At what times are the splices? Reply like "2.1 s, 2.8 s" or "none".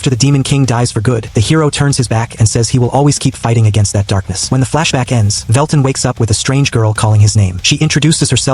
1.3 s, 4.3 s, 5.4 s, 7.6 s

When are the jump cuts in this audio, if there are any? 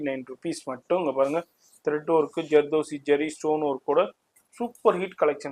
none

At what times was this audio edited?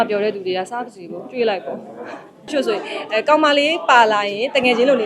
2.5 s

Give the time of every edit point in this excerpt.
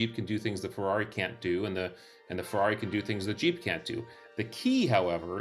none

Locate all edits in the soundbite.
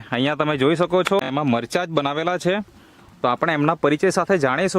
1.2 s

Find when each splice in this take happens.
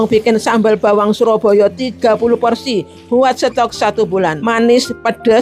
4.4 s

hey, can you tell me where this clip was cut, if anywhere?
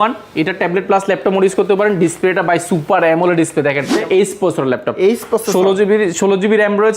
3.9 s

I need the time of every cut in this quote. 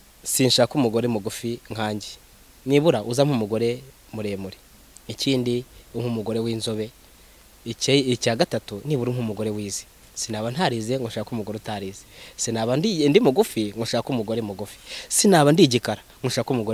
none

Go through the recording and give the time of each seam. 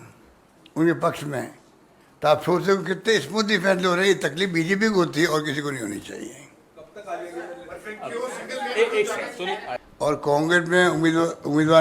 9.8 s

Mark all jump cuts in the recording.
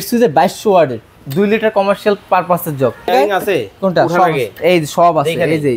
3.1 s

